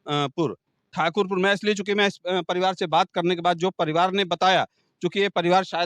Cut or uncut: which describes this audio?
uncut